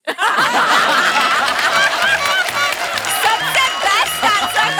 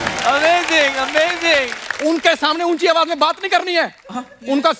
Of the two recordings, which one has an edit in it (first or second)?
second